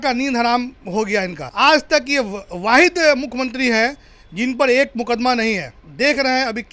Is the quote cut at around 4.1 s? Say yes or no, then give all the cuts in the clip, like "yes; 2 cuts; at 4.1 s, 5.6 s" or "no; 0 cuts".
no; 2 cuts; at 1.4 s, 5.8 s